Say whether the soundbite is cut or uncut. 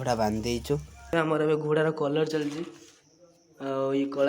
cut